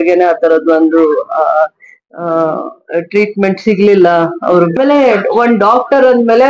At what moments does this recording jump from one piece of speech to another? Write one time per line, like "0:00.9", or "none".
0:04.7